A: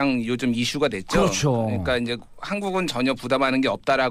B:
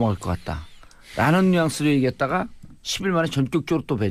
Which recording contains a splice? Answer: A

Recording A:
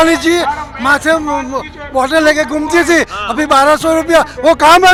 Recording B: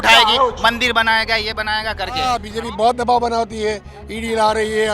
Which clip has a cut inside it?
B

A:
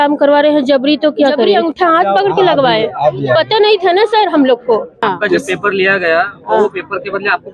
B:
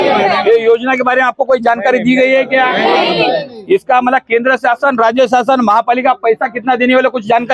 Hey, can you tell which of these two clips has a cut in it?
A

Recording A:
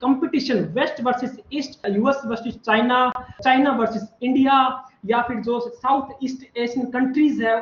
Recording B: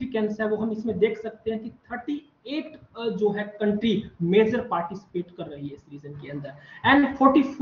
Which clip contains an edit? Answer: A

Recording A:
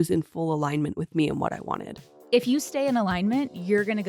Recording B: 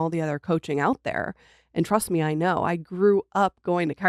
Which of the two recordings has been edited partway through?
A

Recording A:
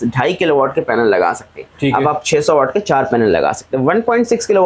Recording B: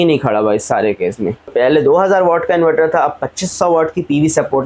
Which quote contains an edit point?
B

